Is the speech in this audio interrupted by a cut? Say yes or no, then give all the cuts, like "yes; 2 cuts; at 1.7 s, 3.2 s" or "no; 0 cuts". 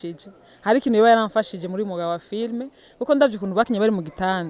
no; 0 cuts